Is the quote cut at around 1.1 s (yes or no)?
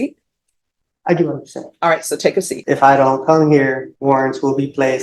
no